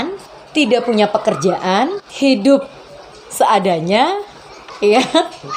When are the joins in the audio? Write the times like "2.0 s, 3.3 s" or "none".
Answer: none